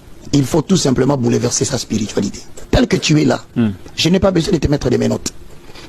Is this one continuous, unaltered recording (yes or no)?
no